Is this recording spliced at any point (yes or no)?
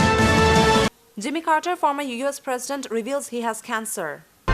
yes